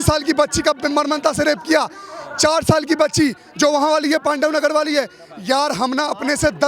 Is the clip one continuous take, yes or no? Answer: yes